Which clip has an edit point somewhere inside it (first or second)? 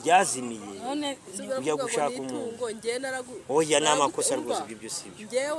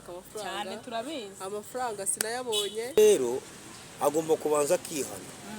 second